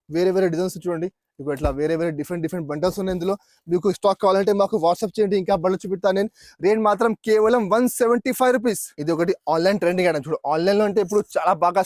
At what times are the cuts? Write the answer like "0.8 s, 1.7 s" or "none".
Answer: 8.9 s